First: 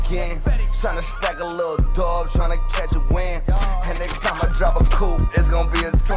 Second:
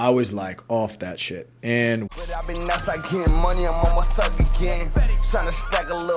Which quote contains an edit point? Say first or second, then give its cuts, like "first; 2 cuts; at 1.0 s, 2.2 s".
second; 1 cut; at 2.1 s